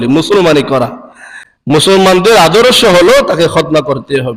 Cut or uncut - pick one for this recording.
cut